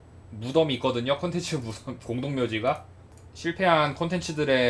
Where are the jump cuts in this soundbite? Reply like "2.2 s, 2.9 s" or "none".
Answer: none